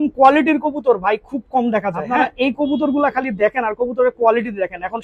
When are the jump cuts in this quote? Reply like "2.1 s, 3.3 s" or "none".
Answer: 2.1 s